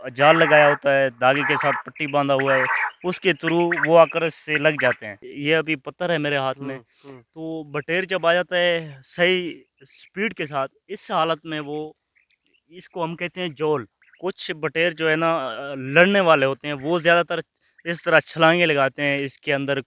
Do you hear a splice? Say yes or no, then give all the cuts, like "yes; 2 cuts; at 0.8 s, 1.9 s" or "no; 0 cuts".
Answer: yes; 2 cuts; at 5.2 s, 14.0 s